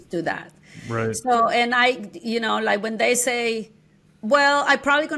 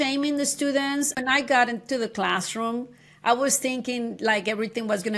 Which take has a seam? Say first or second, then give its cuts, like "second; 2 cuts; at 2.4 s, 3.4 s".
second; 1 cut; at 1.2 s